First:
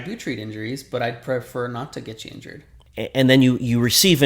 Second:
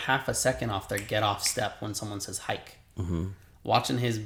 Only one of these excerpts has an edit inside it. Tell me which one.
first; 1 cut; at 2.8 s

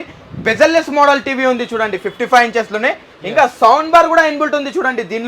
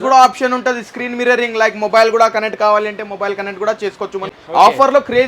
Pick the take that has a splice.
second; 1 cut; at 4.4 s

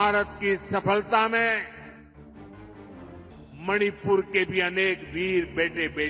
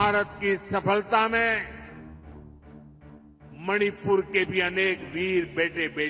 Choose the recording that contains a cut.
second; 2 cuts; at 1.8 s, 3.4 s

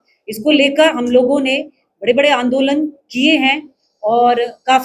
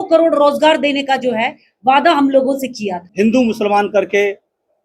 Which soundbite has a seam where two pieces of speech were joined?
second; 1 cut; at 3.0 s

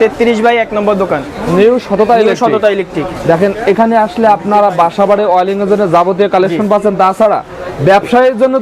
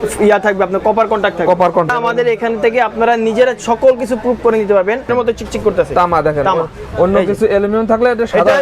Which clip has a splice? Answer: second; 2 cuts; at 1.9 s, 5.1 s

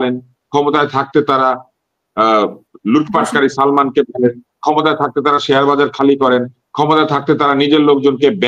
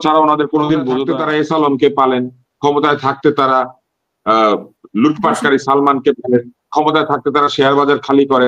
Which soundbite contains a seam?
second; 1 cut; at 1.1 s

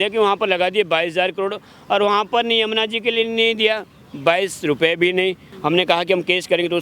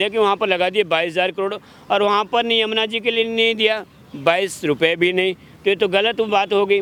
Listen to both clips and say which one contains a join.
first; 1 cut; at 5.5 s

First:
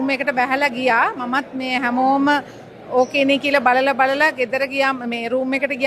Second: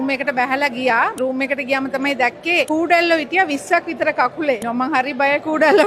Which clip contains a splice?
second; 3 cuts; at 1.1 s, 2.7 s, 4.7 s

